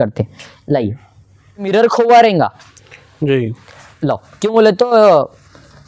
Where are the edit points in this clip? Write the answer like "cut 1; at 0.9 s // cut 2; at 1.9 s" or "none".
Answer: cut 1; at 1.7 s